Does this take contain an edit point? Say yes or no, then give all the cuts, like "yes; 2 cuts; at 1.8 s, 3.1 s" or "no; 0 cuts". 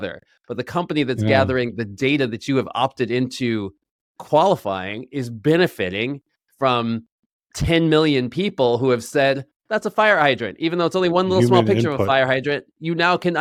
no; 0 cuts